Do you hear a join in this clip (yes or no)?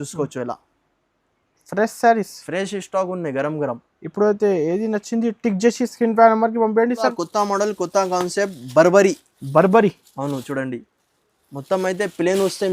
yes